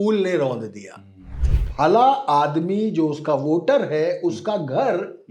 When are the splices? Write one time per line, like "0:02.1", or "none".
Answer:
0:01.5